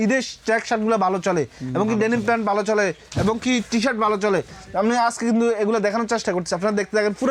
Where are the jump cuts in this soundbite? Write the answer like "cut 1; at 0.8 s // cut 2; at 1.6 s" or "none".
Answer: none